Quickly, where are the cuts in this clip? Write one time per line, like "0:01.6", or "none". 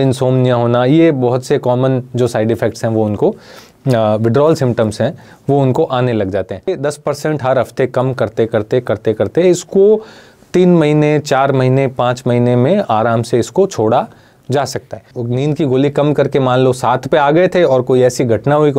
0:06.8
0:15.2